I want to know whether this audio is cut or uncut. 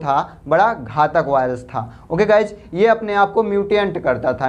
uncut